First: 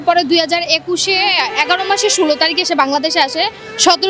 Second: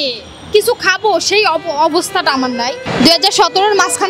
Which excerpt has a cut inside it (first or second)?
second